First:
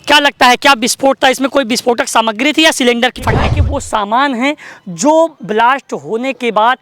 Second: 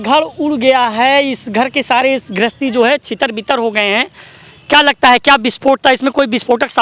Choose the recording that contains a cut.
first; 1 cut; at 3.5 s

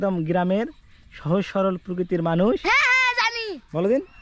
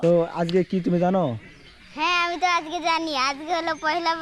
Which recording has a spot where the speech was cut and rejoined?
first; 1 cut; at 2.6 s

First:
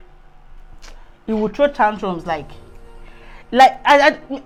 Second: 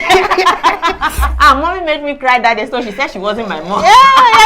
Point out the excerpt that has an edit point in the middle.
second; 1 cut; at 1.3 s

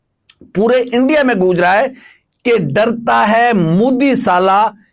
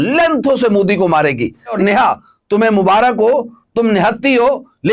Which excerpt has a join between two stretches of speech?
second; 1 cut; at 1.8 s

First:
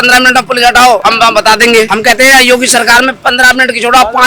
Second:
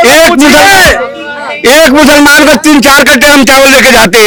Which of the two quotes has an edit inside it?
first; 2 cuts; at 1.0 s, 1.9 s

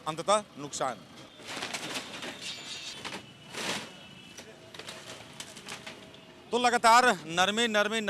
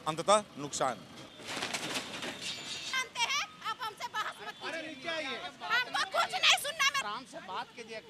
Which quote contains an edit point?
second; 2 cuts; at 2.9 s, 7.0 s

